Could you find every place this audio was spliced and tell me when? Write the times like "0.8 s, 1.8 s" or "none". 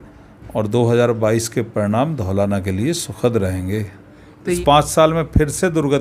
4.6 s